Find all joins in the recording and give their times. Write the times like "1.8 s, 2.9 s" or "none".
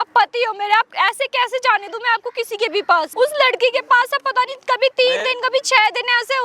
3.1 s